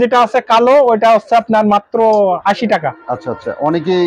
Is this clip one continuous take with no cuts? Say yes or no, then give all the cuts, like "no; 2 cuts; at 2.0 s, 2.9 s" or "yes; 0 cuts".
yes; 0 cuts